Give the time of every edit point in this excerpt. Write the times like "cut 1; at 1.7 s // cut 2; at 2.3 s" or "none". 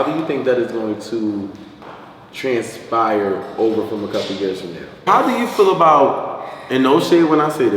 cut 1; at 5.0 s